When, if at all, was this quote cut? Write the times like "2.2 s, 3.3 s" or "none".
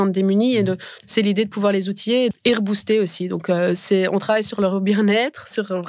0.9 s, 2.3 s